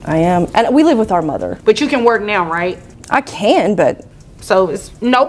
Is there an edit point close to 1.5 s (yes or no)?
yes